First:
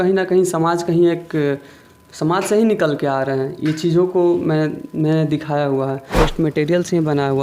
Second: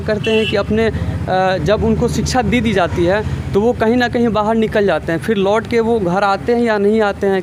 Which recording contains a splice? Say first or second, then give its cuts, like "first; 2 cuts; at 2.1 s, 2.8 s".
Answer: first; 1 cut; at 6.1 s